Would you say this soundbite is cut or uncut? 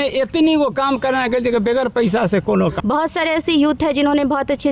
cut